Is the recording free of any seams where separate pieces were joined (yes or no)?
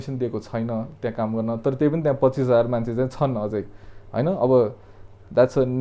yes